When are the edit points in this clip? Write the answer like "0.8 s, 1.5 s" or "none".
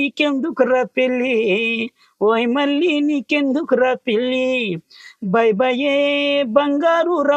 none